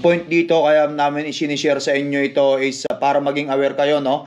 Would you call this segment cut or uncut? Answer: uncut